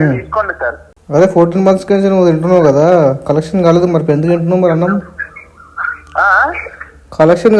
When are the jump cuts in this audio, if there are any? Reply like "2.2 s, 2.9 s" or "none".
0.9 s